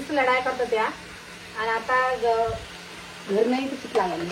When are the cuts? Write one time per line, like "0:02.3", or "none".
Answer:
none